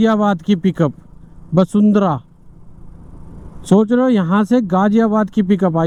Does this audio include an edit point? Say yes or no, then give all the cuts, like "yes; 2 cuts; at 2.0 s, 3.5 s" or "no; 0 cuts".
no; 0 cuts